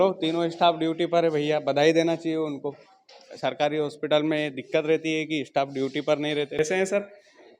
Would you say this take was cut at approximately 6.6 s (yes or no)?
yes